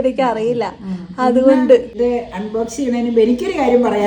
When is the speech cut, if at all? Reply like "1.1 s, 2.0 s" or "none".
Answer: 1.9 s